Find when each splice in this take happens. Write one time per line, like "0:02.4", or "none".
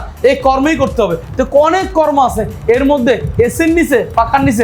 none